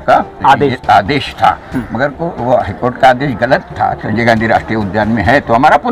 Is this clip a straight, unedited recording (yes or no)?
no